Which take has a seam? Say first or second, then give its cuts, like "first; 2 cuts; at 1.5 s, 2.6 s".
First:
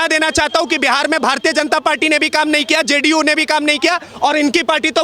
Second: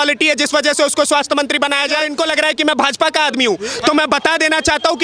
second; 1 cut; at 2.1 s